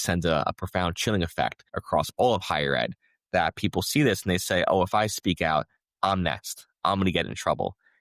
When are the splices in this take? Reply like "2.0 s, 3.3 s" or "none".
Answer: 1.7 s